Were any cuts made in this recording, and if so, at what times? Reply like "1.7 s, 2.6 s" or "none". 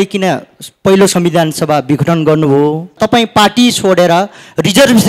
3.0 s